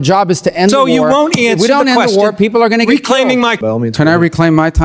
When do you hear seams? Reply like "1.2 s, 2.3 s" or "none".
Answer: 3.6 s